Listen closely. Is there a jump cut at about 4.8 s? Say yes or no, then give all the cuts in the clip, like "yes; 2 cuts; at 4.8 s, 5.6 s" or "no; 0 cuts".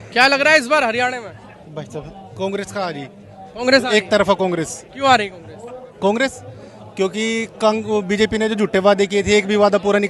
no; 0 cuts